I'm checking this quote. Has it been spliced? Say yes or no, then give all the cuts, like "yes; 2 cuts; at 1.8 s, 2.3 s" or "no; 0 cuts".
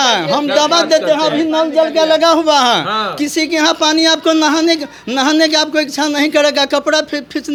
no; 0 cuts